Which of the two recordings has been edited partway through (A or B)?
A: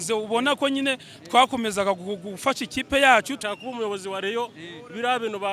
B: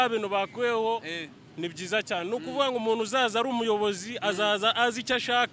A